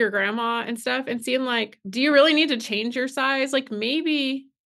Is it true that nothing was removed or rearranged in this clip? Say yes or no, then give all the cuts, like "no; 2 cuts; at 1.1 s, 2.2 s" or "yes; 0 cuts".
no; 1 cut; at 1.8 s